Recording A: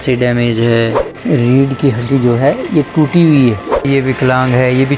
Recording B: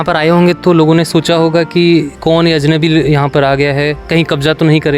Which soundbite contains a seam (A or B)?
A